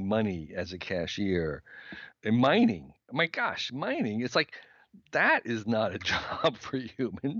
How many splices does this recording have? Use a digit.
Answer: 1